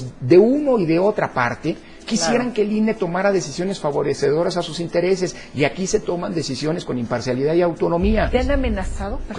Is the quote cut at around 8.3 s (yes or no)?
yes